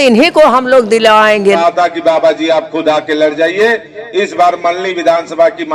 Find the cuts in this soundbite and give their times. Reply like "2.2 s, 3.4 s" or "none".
1.6 s